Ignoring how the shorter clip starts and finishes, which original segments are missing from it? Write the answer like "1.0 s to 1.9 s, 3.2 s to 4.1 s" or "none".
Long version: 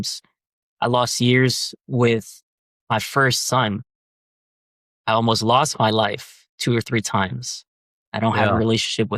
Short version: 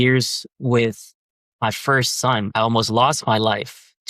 3.8 s to 5.0 s